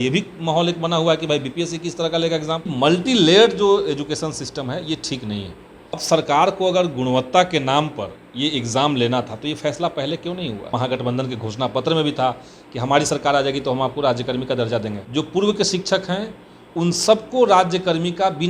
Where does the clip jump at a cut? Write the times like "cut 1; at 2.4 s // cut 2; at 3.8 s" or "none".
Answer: cut 1; at 2.7 s // cut 2; at 6.0 s // cut 3; at 10.7 s // cut 4; at 15.0 s

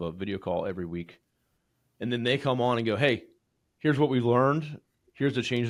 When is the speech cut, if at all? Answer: none

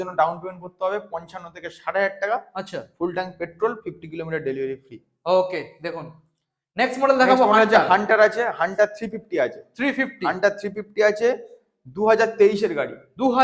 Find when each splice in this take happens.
none

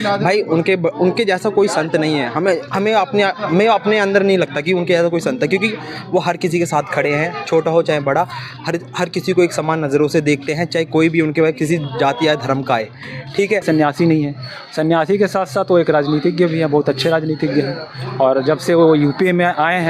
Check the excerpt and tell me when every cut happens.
cut 1; at 13.6 s

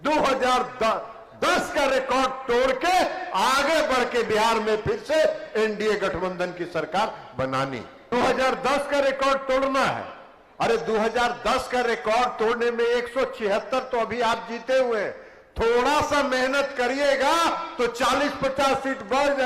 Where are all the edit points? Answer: cut 1; at 8.0 s

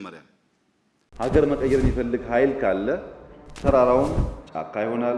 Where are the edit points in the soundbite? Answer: cut 1; at 1.0 s

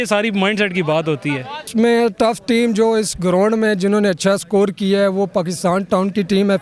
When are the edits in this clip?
cut 1; at 1.7 s

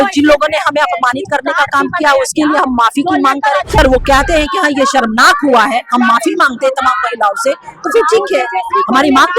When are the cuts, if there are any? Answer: cut 1; at 3.8 s

